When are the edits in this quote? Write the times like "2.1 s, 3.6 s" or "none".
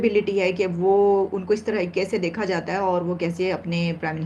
none